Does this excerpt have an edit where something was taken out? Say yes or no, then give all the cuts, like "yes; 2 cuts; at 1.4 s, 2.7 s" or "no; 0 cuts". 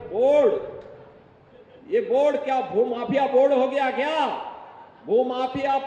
no; 0 cuts